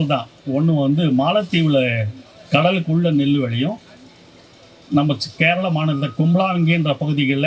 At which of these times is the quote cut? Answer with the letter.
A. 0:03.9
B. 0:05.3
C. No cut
C